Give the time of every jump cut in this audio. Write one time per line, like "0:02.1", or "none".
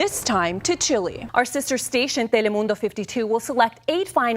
0:01.2